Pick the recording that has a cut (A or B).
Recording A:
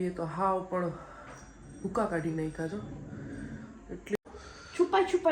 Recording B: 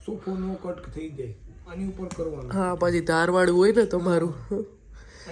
A